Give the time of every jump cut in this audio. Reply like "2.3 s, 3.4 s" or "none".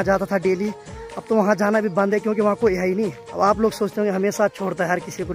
3.2 s